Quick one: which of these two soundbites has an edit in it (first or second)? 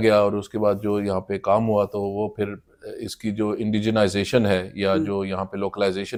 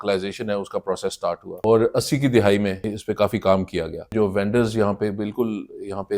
second